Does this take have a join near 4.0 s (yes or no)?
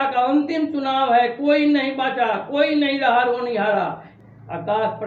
yes